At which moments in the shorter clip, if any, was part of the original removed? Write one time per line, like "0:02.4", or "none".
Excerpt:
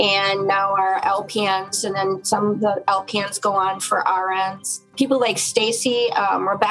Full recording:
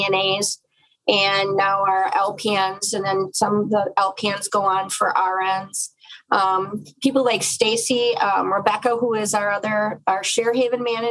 0:04.8